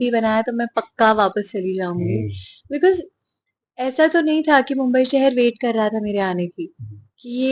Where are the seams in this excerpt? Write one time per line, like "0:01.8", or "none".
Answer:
none